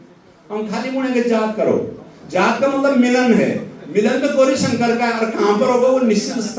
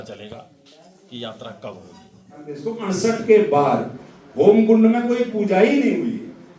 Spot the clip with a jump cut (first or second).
second